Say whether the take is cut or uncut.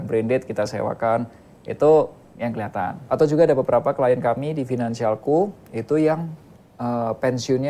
cut